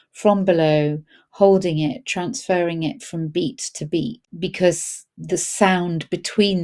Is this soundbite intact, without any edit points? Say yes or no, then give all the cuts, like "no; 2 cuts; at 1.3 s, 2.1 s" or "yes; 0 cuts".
no; 2 cuts; at 4.2 s, 5.1 s